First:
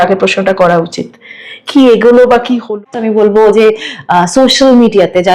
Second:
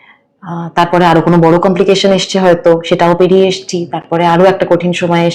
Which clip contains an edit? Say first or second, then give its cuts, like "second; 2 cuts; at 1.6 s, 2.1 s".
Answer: first; 1 cut; at 2.7 s